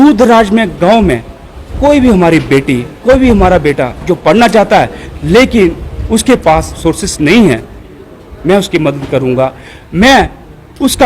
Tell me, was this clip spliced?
yes; 2 cuts; at 5.0 s, 6.8 s

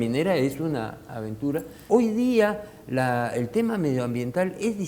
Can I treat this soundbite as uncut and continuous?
no; 1 cut; at 1.7 s

